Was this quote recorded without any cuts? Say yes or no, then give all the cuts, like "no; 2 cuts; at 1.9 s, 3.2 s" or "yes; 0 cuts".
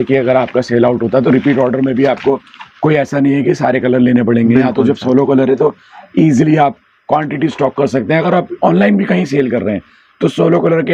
yes; 0 cuts